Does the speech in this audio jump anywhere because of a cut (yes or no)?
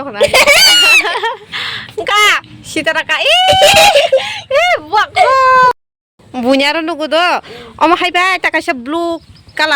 yes